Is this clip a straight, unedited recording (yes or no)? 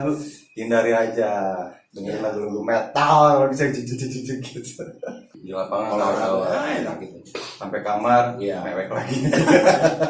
no